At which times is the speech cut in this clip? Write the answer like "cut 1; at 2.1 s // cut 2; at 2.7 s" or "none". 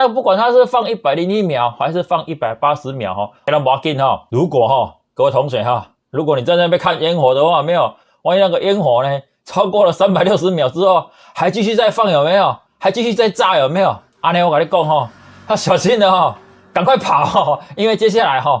cut 1; at 3.5 s // cut 2; at 4.2 s